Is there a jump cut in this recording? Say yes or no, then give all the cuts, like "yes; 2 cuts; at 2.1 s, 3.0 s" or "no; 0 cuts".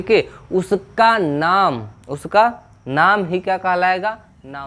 no; 0 cuts